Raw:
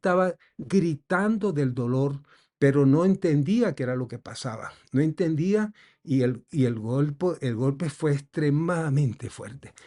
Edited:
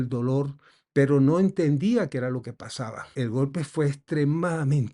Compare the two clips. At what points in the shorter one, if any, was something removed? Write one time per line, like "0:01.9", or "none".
0:03.1